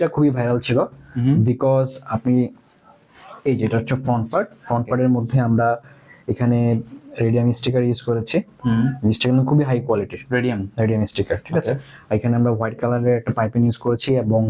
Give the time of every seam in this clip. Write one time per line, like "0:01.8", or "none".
none